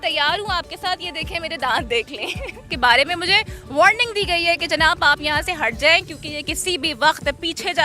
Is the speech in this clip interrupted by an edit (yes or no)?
yes